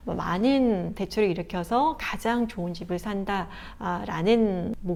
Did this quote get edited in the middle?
no; 0 cuts

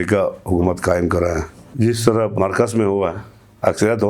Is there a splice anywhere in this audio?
yes; 2 cuts; at 1.6 s, 2.3 s

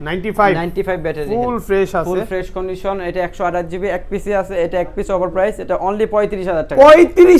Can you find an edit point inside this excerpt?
no; 0 cuts

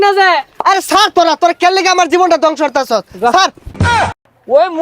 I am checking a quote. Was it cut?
yes; 1 cut; at 3.9 s

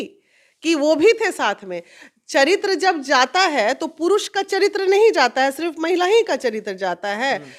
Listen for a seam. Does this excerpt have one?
no; 0 cuts

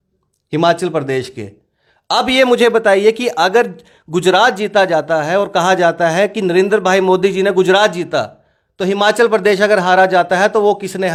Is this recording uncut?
yes; 0 cuts

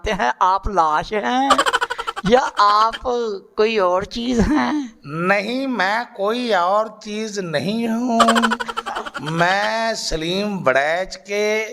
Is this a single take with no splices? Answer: yes; 0 cuts

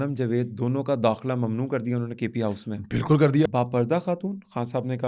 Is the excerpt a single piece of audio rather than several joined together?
no; 1 cut; at 3.5 s

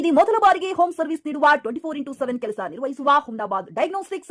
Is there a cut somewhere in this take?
no; 0 cuts

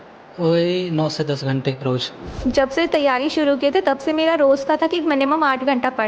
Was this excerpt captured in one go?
no; 1 cut; at 2.4 s

